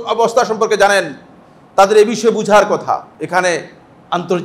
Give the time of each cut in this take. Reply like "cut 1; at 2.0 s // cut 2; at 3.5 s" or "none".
cut 1; at 3.1 s